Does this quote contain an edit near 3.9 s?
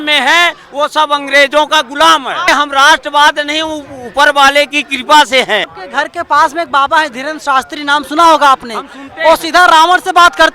no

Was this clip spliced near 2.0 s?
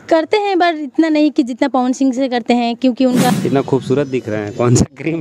no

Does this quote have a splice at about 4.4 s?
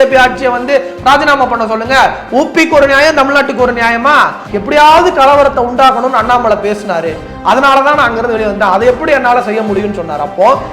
yes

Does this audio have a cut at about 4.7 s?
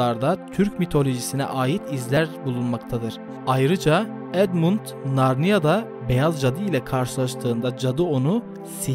no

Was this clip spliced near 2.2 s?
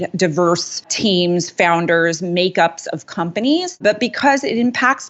no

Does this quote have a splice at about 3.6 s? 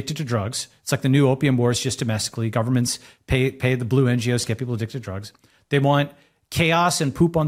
no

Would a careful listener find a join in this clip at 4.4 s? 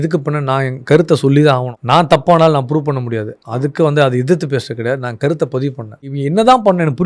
no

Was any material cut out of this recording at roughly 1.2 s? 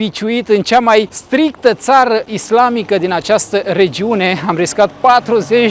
yes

